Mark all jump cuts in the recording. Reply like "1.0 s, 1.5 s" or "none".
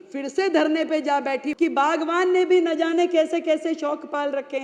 1.5 s